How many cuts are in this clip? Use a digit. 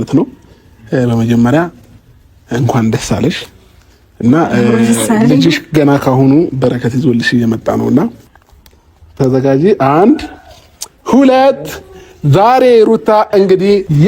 1